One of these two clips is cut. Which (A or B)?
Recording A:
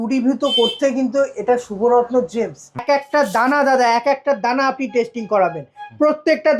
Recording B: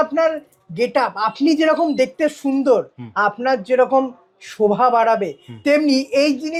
A